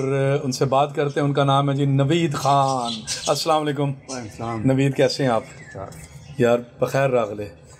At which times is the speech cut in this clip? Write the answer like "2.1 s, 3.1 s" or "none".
none